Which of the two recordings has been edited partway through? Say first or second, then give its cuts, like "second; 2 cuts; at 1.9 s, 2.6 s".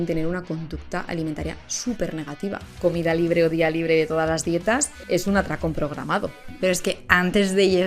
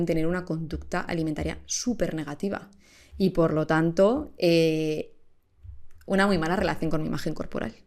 first; 3 cuts; at 2.8 s, 4.9 s, 6.5 s